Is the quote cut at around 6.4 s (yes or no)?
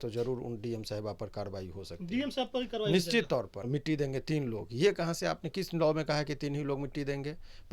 no